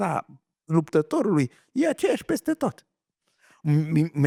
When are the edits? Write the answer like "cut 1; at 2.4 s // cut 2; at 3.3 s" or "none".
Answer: none

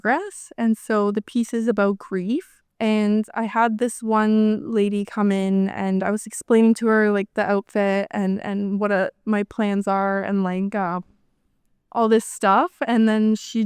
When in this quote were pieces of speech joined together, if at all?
cut 1; at 2.6 s

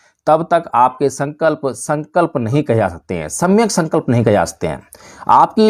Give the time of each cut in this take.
none

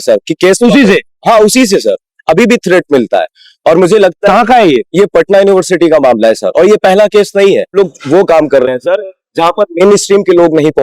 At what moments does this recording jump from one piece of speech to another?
cut 1; at 7.7 s

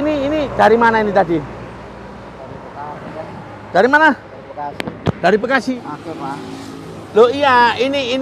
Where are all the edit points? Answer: cut 1; at 5.9 s

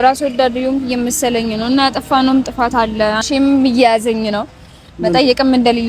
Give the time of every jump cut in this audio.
cut 1; at 3.2 s

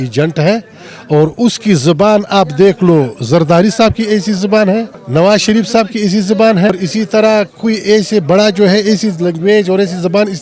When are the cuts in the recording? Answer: cut 1; at 5.0 s // cut 2; at 6.7 s

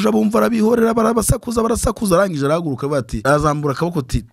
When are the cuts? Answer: cut 1; at 3.2 s

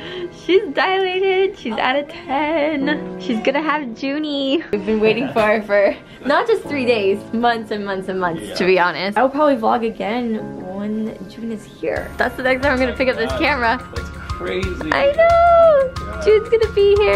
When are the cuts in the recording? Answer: cut 1; at 4.8 s // cut 2; at 9.1 s

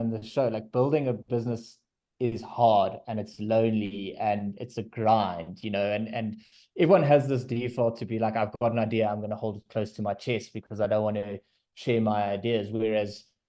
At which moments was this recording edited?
none

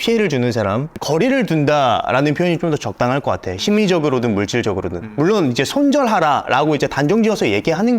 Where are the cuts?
cut 1; at 0.9 s

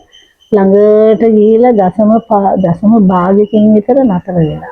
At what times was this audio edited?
none

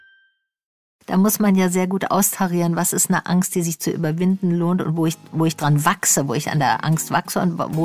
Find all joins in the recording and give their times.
cut 1; at 0.9 s

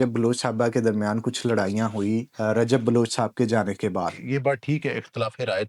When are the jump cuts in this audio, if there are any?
cut 1; at 2.3 s // cut 2; at 4.2 s

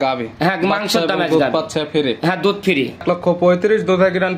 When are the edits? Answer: cut 1; at 3.0 s

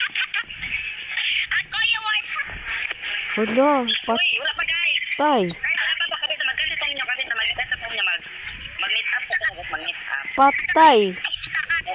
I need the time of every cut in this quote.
none

